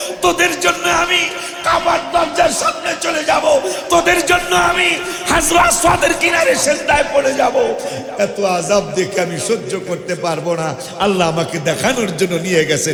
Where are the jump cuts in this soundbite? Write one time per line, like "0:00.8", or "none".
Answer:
none